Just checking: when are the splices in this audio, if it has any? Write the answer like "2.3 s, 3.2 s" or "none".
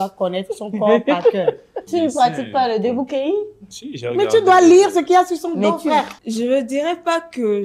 1.9 s, 6.2 s